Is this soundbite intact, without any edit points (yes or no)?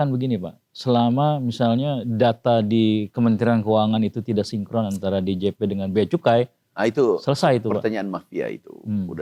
yes